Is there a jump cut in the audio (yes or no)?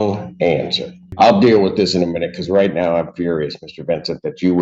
yes